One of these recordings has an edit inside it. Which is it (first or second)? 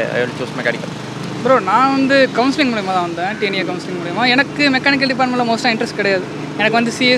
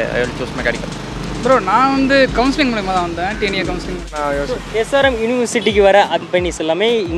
second